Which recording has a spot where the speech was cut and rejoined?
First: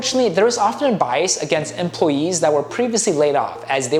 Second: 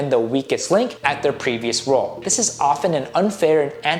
second; 2 cuts; at 1.0 s, 2.2 s

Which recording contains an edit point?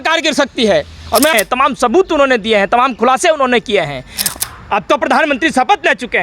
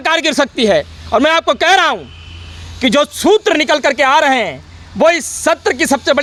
first; 2 cuts; at 1.3 s, 4.1 s

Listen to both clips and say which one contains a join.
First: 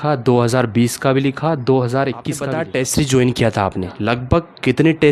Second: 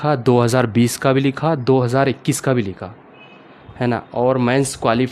first; 1 cut; at 2.3 s

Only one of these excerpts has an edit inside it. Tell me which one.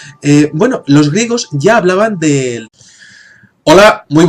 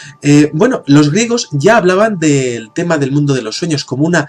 second; 1 cut; at 2.7 s

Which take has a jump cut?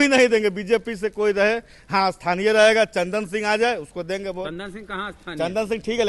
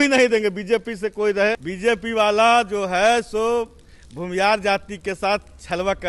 second; 1 cut; at 1.7 s

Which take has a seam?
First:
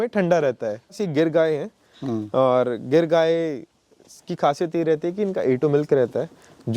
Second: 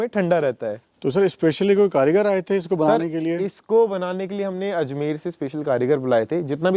first; 1 cut; at 1.0 s

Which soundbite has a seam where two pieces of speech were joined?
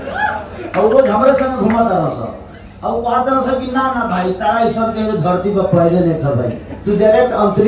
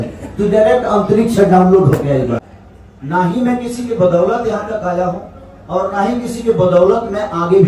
second; 1 cut; at 2.4 s

